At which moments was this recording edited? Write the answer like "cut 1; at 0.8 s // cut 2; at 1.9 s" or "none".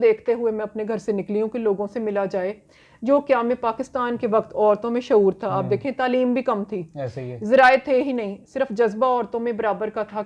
none